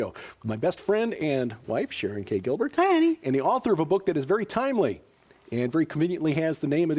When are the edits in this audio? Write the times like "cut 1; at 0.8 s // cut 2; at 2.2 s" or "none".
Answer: none